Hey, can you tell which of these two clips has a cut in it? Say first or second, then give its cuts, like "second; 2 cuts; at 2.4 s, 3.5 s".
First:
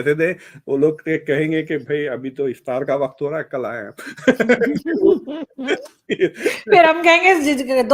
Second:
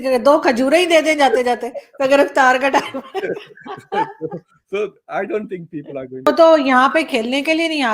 second; 1 cut; at 6.3 s